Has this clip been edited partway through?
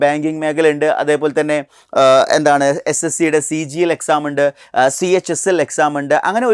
no; 0 cuts

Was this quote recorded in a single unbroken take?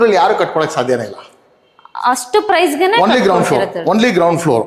yes; 0 cuts

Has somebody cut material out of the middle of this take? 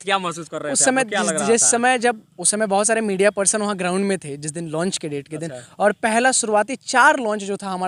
no; 0 cuts

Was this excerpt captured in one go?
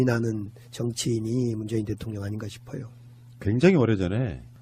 yes; 0 cuts

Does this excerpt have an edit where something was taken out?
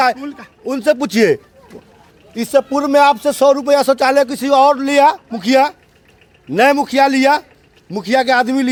no; 0 cuts

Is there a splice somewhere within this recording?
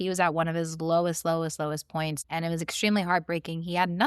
yes; 1 cut; at 2.2 s

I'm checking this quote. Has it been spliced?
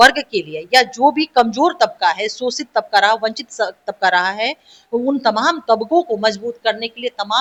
no; 0 cuts

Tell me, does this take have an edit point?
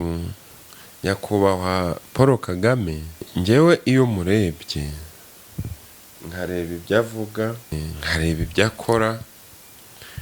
yes; 2 cuts; at 3.3 s, 7.9 s

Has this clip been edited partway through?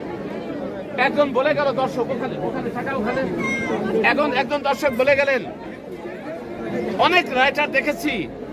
no; 0 cuts

